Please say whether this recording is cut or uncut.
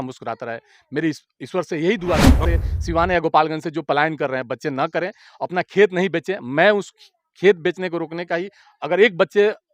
cut